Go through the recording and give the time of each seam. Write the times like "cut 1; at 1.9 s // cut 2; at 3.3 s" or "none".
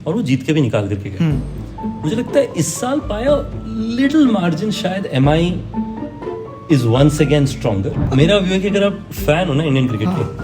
cut 1; at 8.0 s